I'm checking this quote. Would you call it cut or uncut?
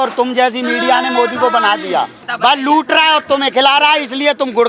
cut